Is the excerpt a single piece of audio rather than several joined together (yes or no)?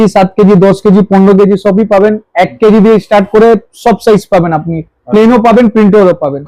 yes